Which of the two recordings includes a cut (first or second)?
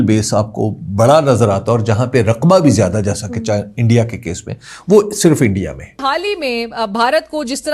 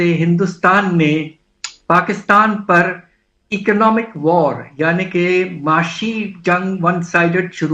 first